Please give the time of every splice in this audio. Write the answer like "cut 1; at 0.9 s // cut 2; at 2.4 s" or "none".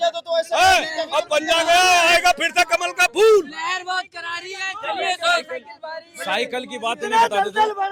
none